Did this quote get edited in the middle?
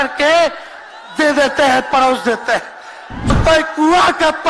yes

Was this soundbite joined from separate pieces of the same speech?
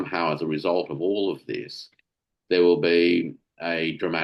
no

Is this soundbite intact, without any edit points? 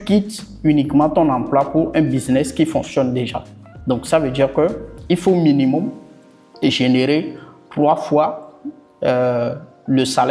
yes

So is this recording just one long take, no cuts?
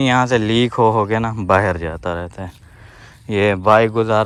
yes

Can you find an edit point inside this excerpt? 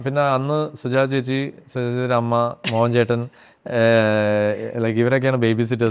no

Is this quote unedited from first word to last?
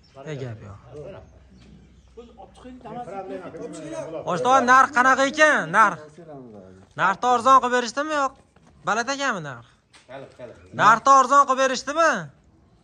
yes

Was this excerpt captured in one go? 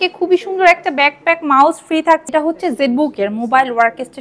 no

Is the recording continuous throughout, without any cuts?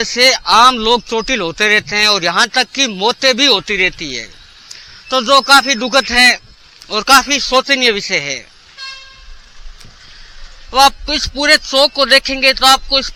yes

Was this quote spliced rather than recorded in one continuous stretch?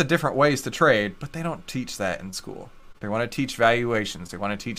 no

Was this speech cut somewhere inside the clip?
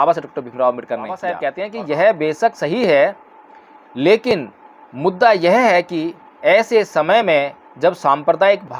yes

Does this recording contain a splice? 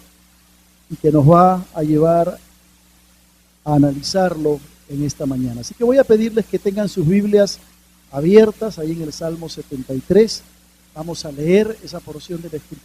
yes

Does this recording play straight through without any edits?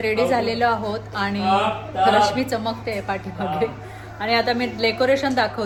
yes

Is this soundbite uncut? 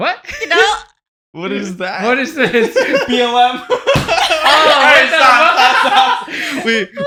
yes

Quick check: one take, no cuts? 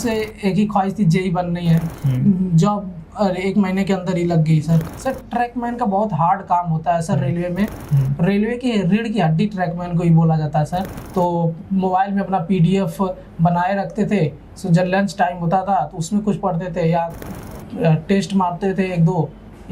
no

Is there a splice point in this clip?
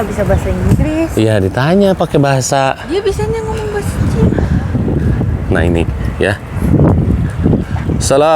yes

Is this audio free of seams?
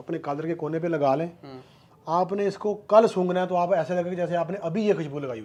yes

